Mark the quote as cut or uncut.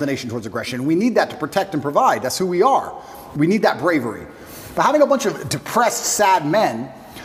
uncut